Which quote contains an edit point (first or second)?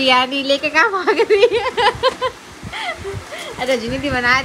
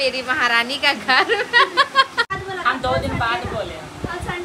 second